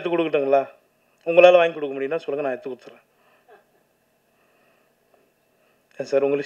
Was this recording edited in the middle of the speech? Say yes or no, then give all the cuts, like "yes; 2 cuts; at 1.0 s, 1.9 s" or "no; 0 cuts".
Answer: no; 0 cuts